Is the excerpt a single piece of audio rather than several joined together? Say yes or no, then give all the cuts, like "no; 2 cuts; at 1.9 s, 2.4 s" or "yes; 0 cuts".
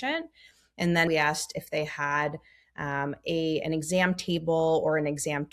no; 1 cut; at 1.1 s